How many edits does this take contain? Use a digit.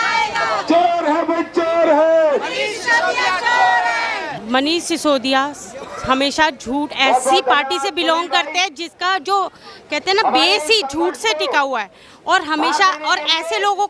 1